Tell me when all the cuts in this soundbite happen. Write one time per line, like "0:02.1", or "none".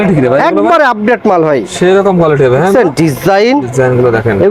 none